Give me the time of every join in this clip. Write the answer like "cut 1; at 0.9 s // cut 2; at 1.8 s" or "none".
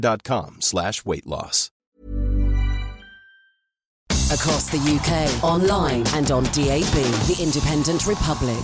cut 1; at 4.0 s

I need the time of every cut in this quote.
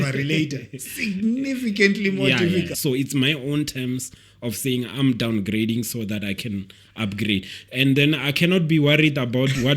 cut 1; at 2.7 s

